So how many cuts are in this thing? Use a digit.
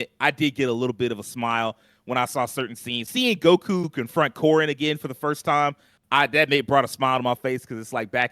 2